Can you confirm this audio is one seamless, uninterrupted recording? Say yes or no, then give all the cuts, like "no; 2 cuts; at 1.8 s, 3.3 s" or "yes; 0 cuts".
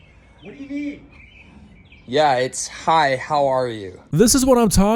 yes; 0 cuts